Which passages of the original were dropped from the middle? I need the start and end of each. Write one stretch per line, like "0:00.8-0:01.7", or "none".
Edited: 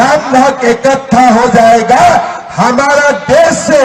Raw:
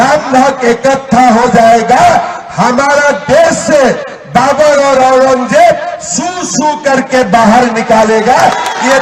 none